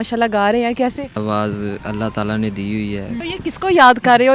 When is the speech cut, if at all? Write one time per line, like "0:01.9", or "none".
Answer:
0:01.2
0:03.2